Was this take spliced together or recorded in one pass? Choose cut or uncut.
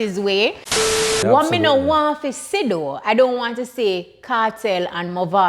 cut